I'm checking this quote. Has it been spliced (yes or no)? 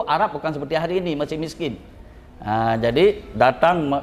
no